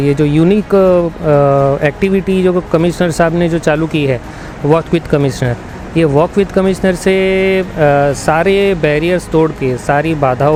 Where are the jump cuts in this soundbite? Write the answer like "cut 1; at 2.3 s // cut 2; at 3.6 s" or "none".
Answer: none